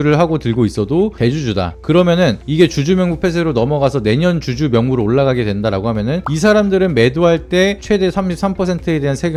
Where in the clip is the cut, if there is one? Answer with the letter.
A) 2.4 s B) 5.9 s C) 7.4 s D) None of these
D